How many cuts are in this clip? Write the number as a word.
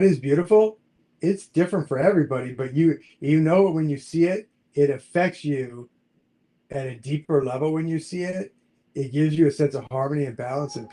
zero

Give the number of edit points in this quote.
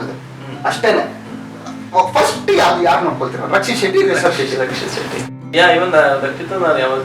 one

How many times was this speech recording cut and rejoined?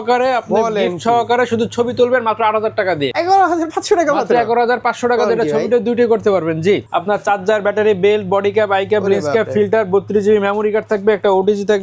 two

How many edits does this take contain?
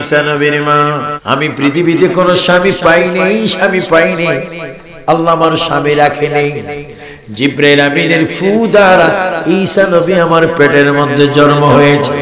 one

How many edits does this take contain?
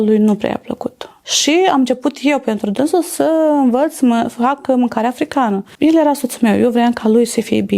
two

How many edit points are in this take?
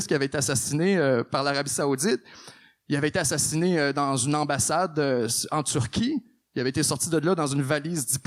zero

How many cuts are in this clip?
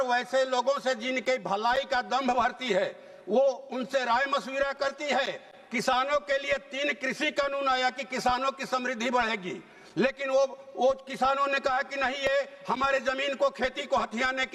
zero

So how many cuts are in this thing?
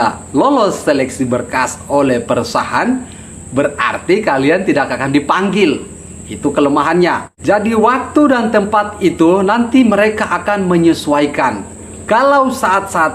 zero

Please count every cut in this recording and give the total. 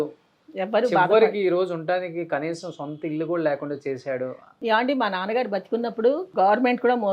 two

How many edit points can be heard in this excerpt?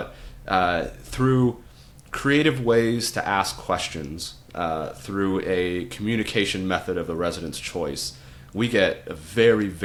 zero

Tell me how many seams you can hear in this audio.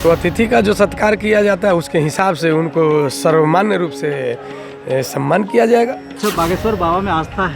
one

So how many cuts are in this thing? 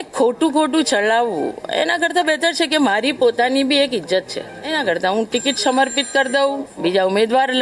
one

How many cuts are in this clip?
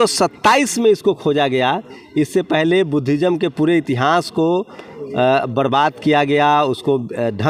zero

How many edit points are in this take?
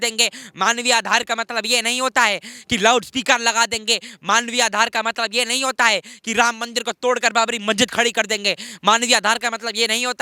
zero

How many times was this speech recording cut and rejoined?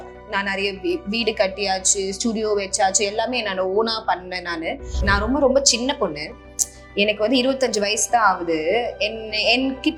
one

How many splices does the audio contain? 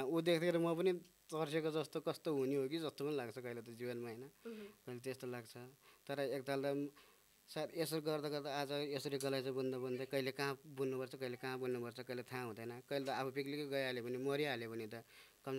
zero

